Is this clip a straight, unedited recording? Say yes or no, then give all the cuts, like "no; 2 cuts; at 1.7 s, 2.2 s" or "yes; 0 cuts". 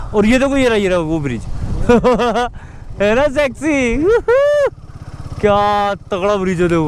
yes; 0 cuts